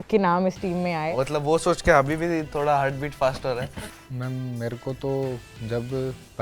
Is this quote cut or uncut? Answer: cut